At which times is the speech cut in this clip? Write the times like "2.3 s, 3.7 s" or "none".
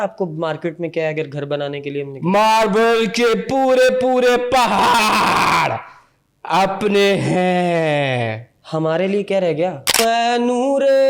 10.0 s